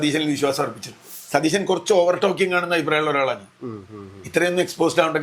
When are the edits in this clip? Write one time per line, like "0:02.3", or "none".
0:01.1